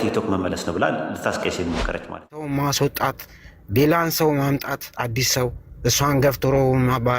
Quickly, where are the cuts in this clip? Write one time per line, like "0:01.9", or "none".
0:02.5